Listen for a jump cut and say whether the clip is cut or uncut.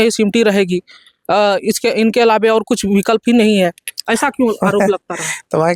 uncut